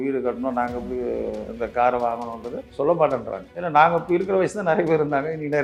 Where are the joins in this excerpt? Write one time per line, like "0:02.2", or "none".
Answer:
none